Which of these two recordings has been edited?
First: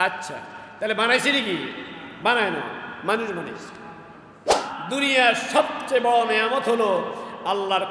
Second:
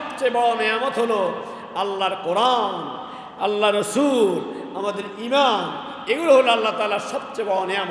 first; 1 cut; at 4.6 s

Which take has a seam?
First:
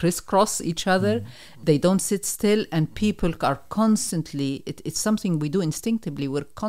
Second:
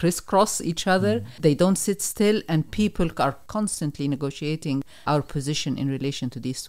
second; 3 cuts; at 1.3 s, 3.4 s, 4.9 s

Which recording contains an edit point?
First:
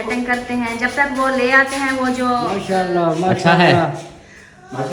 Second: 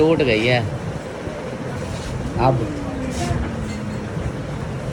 first; 1 cut; at 2.6 s

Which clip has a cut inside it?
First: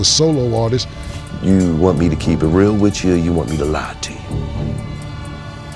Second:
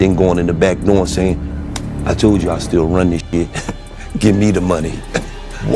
first; 1 cut; at 1.0 s

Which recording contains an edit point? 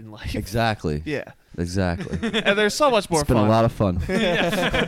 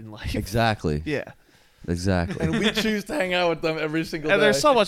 first; 2 cuts; at 1.4 s, 2.4 s

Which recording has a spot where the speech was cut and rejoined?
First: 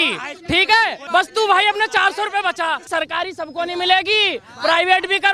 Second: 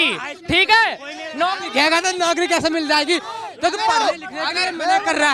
first; 2 cuts; at 1.0 s, 2.9 s

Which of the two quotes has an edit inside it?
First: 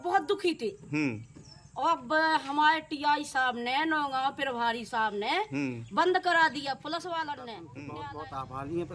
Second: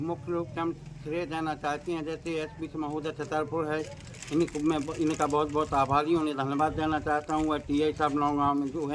first; 1 cut; at 7.8 s

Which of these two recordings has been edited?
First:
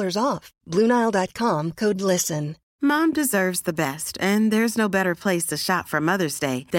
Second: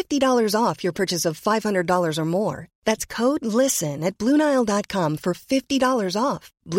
first; 1 cut; at 2.6 s

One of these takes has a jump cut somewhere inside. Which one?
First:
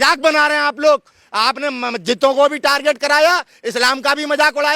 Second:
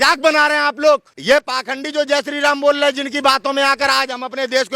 second; 1 cut; at 1.1 s

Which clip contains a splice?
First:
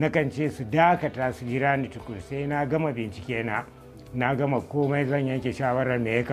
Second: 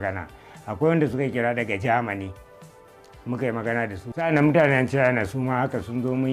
second; 1 cut; at 4.2 s

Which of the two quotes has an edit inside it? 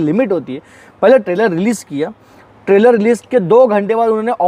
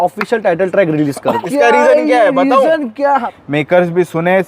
second; 2 cuts; at 1.4 s, 3.3 s

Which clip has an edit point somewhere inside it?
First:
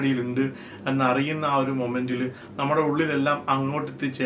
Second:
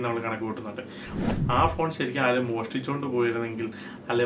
second; 1 cut; at 1.1 s

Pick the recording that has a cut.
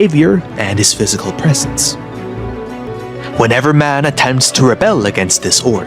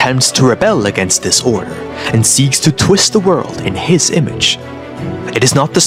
first; 1 cut; at 2.9 s

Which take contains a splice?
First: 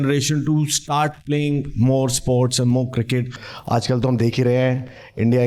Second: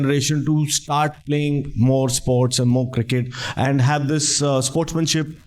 first; 1 cut; at 3.4 s

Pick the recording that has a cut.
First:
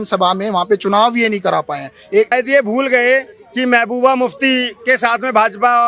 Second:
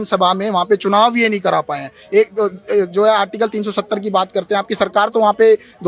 first; 1 cut; at 2.3 s

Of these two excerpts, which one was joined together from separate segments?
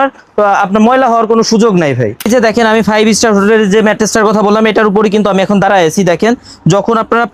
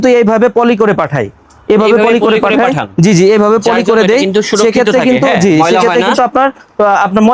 first; 1 cut; at 2.1 s

